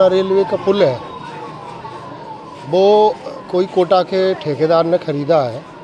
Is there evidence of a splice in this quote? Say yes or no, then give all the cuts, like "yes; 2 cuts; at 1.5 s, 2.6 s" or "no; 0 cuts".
no; 0 cuts